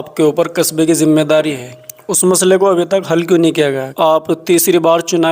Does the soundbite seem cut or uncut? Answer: cut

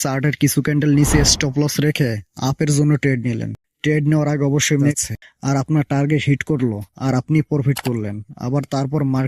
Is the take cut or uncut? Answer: cut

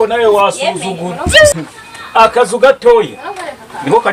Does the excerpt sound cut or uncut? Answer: uncut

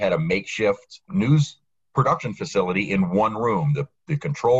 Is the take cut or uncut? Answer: cut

